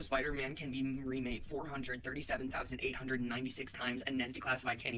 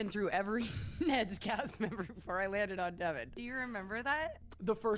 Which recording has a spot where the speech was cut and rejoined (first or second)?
second